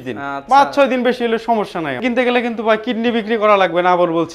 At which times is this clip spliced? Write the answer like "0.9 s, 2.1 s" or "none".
2.0 s

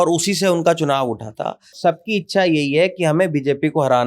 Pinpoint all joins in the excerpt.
none

